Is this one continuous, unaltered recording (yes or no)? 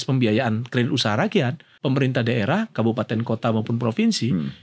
no